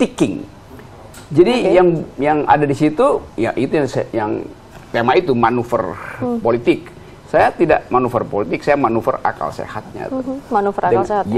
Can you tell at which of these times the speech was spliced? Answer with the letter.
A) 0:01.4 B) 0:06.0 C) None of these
C